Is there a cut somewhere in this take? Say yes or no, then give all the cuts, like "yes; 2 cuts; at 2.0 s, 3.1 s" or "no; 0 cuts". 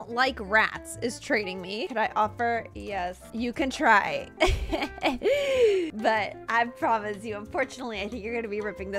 yes; 3 cuts; at 1.8 s, 3.2 s, 5.9 s